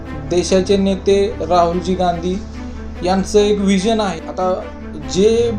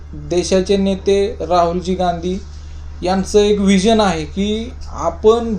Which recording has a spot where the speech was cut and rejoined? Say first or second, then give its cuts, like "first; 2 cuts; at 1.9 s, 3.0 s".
first; 1 cut; at 4.2 s